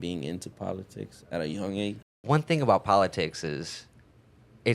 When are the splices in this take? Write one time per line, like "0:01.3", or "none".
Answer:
0:02.1